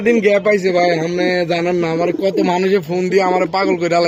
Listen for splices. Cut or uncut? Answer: uncut